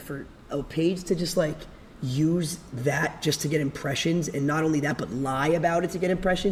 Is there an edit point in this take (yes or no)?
no